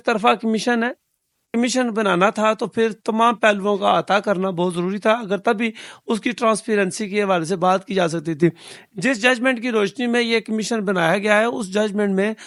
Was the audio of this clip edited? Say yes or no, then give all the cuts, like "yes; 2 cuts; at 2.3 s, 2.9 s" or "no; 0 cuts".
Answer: no; 0 cuts